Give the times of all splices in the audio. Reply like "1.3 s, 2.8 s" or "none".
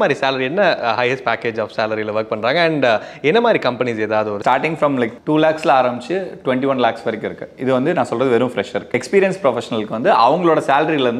4.4 s, 9.0 s